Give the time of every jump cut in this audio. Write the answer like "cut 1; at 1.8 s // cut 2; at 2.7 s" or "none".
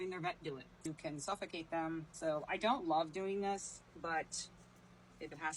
cut 1; at 0.8 s // cut 2; at 2.1 s // cut 3; at 3.8 s